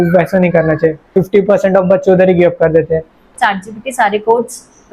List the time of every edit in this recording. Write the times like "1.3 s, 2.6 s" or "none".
1.1 s, 3.3 s